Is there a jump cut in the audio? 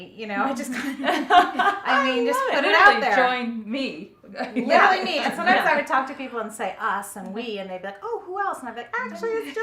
no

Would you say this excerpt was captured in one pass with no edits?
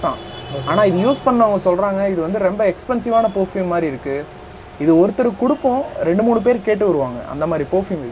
yes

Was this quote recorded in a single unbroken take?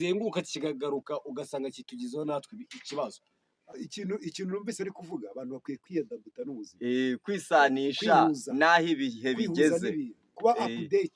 no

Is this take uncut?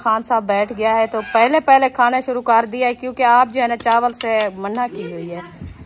yes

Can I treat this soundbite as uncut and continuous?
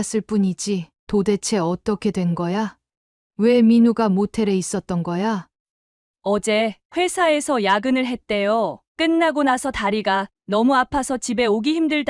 no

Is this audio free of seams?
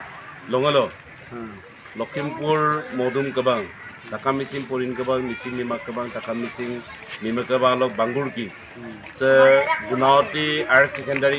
yes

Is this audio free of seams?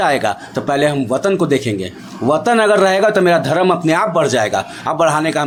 yes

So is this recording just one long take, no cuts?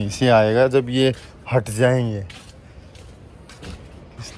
yes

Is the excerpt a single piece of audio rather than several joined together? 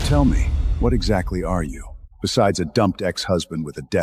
yes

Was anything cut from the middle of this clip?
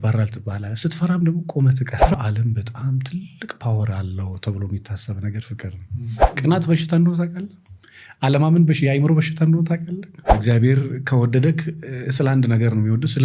yes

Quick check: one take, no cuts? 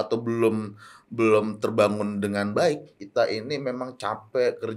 no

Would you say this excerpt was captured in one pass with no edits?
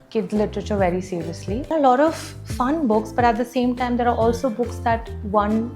no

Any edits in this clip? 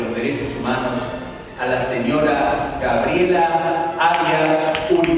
no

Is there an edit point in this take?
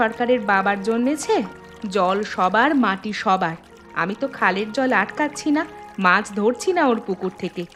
no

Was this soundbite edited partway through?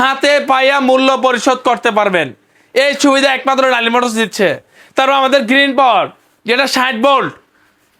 no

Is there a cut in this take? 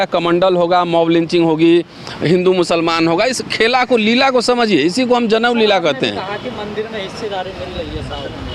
no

